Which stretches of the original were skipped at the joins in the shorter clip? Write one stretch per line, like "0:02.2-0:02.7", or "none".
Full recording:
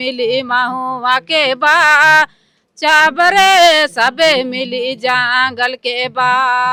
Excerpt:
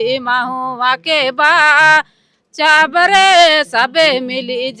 none